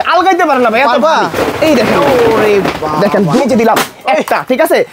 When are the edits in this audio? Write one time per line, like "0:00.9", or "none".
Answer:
0:03.4